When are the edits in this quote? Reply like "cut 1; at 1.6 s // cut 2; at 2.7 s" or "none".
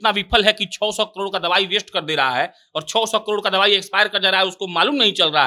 none